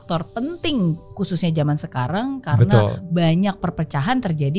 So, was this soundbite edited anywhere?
no; 0 cuts

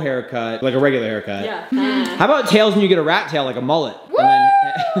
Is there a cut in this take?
no; 0 cuts

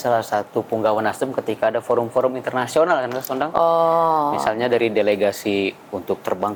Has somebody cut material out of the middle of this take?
no; 0 cuts

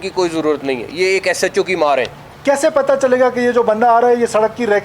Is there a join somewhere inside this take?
yes; 1 cut; at 2.2 s

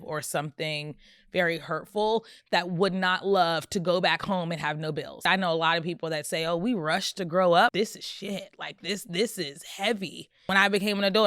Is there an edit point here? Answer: yes; 3 cuts; at 5.2 s, 7.7 s, 10.3 s

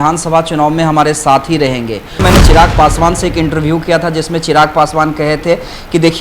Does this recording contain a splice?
yes; 1 cut; at 2.2 s

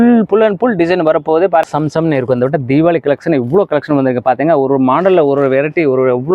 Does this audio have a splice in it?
yes; 1 cut; at 1.7 s

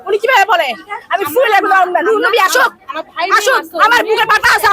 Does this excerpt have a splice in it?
no; 0 cuts

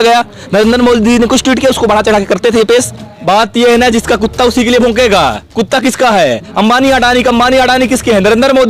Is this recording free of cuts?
no; 1 cut; at 3.0 s

